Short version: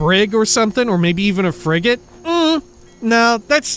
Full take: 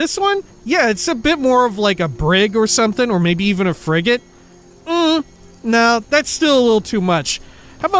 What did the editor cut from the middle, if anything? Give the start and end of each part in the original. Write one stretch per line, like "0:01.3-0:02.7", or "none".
0:04.3-0:04.7